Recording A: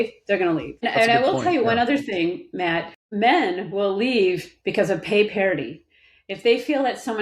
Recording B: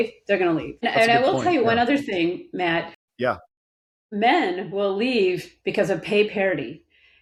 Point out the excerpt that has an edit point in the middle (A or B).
A